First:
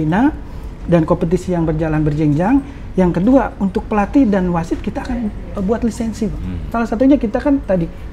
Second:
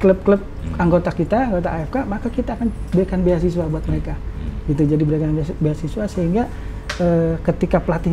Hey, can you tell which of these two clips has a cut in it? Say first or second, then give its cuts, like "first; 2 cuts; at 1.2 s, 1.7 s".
first; 1 cut; at 6.6 s